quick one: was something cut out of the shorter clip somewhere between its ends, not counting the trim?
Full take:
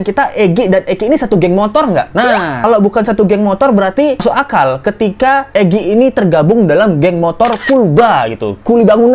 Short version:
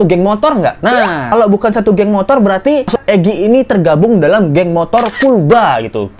yes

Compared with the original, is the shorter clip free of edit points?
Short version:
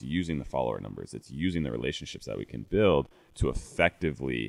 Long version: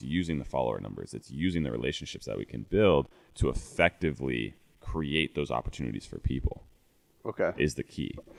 yes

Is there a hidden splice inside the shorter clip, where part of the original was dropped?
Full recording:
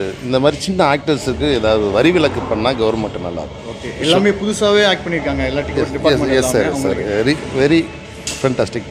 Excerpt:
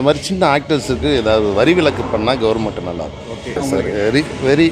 yes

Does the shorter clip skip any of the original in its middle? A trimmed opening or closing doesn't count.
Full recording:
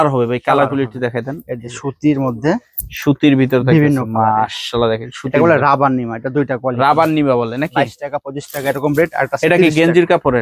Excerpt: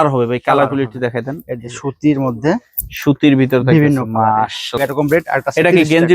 yes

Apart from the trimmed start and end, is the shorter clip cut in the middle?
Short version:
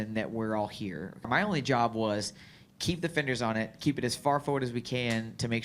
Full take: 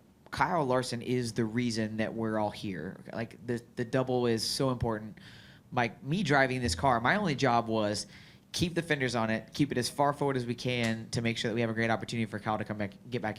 yes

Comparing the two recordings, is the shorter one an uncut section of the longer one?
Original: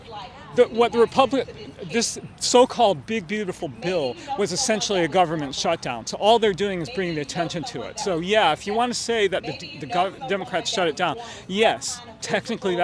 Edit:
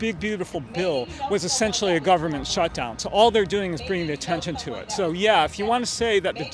yes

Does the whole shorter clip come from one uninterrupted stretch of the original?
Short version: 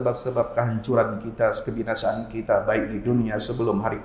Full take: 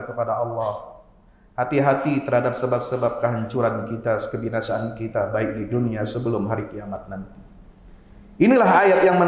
yes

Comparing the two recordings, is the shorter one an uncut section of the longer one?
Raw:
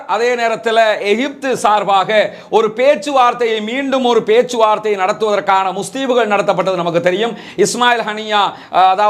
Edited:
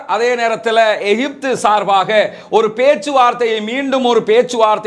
yes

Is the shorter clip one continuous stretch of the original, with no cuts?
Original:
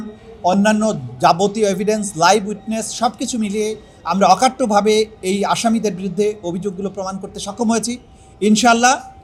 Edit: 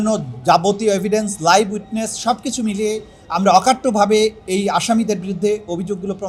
yes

